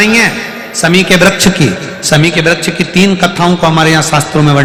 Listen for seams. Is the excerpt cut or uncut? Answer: uncut